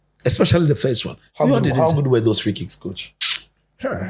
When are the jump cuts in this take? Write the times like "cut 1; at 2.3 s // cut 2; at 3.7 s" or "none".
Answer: none